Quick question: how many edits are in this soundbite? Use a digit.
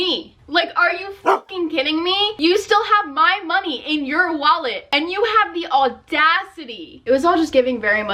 1